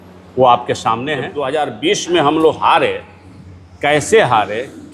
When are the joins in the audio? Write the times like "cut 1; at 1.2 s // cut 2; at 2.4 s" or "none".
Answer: cut 1; at 1.3 s

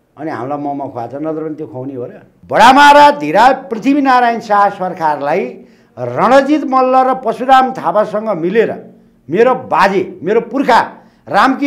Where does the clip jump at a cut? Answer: cut 1; at 2.3 s

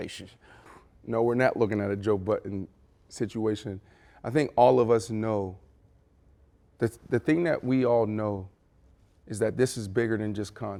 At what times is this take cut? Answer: none

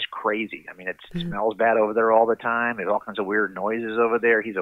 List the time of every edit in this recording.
none

